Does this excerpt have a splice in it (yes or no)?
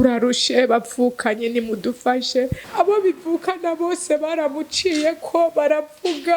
yes